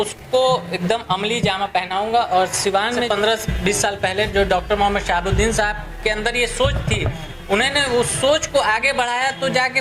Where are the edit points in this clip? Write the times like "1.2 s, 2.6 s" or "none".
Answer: 3.0 s